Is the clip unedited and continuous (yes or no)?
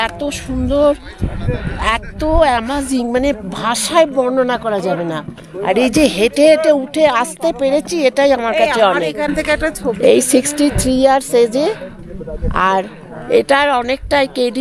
yes